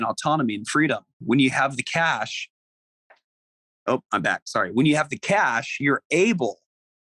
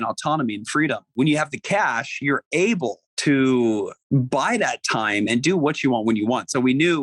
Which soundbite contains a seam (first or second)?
second